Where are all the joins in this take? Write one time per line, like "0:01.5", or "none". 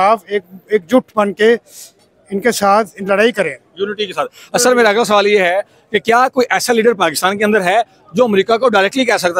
none